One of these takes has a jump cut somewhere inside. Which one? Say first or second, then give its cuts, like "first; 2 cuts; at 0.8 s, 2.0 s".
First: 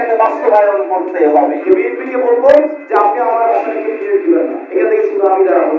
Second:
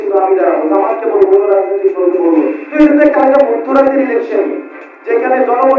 first; 1 cut; at 1.6 s